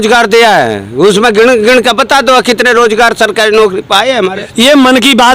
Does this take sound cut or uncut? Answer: cut